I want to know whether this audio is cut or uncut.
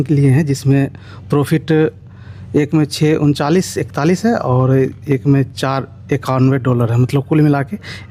uncut